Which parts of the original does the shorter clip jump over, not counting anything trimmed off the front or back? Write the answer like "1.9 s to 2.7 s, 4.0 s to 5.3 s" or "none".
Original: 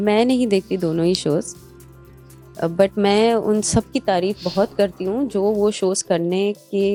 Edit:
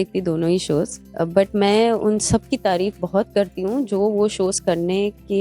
1.6 s to 2.4 s

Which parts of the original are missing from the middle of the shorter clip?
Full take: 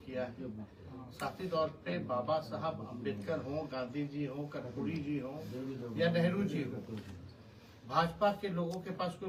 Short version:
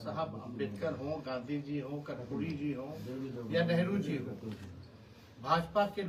none

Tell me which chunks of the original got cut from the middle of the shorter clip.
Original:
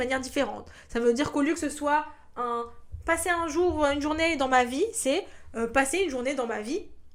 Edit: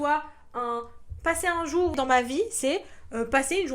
3.8 s to 4.4 s

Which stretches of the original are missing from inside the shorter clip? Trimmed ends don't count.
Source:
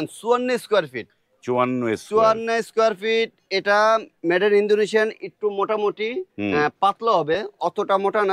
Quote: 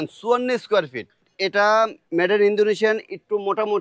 1.3 s to 3.4 s

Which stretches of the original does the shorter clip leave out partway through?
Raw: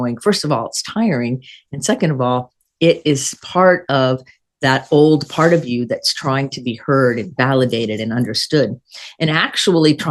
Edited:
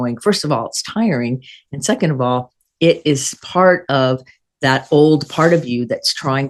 none

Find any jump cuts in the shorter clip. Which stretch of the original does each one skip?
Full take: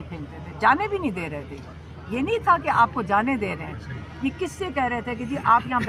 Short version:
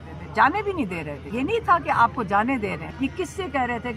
1.4 s to 1.9 s, 3.6 s to 4.1 s

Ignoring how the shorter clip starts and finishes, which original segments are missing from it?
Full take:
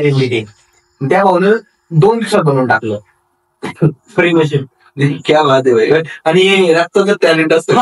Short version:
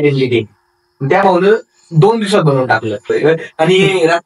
3.1 s to 5.8 s

